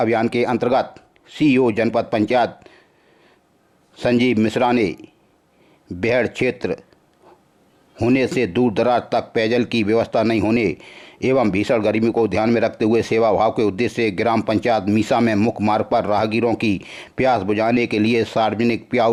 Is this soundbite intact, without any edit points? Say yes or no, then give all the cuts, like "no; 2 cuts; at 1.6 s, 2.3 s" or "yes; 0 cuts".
yes; 0 cuts